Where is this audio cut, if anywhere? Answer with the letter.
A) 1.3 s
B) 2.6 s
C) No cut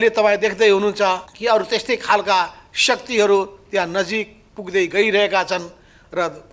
A